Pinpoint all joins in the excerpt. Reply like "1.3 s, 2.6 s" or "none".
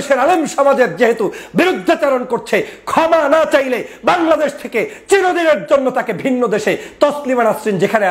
none